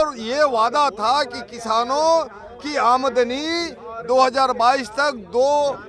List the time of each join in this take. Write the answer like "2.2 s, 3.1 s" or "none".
none